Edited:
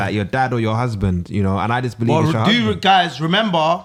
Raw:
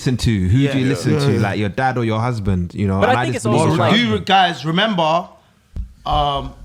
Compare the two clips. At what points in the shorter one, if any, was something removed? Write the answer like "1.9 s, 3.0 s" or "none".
none